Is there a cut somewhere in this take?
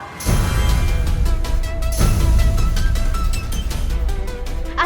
no; 0 cuts

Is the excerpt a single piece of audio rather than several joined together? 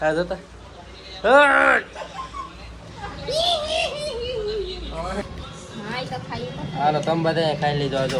no; 1 cut; at 5.2 s

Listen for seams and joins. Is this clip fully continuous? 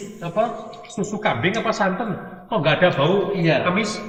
yes; 0 cuts

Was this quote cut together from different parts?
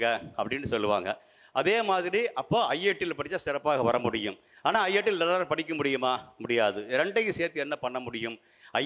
no; 0 cuts

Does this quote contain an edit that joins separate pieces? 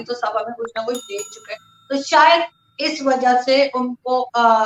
no; 0 cuts

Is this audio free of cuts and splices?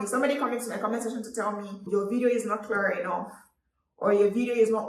no; 1 cut; at 1.8 s

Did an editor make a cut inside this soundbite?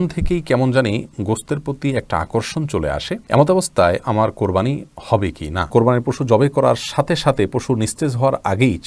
yes; 2 cuts; at 3.2 s, 5.7 s

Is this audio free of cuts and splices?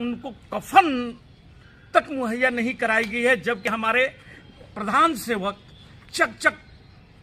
yes; 0 cuts

